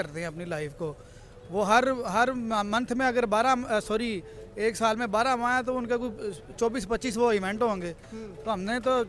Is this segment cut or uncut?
uncut